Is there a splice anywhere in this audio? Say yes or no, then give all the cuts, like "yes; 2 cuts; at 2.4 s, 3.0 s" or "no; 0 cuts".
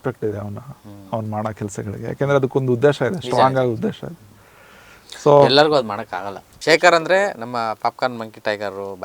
yes; 1 cut; at 6.6 s